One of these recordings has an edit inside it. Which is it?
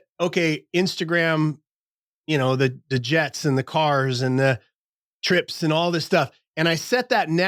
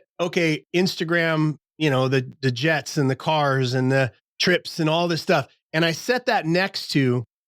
second; 2 cuts; at 1.7 s, 4.2 s

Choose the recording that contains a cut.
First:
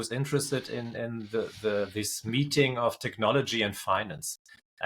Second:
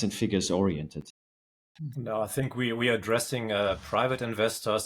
second; 1 cut; at 1.5 s

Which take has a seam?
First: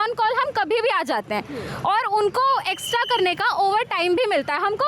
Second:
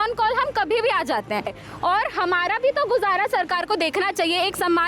second; 1 cut; at 1.6 s

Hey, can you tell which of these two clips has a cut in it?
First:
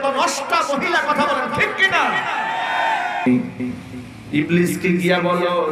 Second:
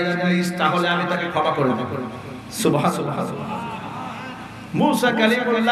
first; 1 cut; at 3.3 s

